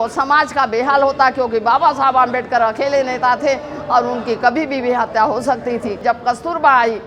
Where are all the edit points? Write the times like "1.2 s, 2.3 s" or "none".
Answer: 6.0 s